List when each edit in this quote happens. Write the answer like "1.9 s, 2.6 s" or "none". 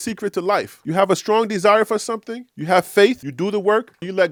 none